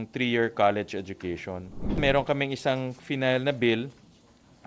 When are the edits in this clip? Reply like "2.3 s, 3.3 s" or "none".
2.0 s